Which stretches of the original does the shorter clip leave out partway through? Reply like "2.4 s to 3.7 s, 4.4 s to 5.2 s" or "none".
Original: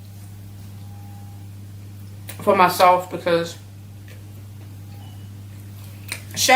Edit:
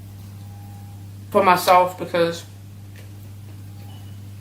1.7 s to 2.4 s